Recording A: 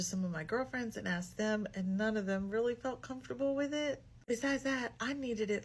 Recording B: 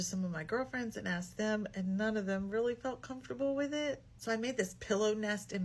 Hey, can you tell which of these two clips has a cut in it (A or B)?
B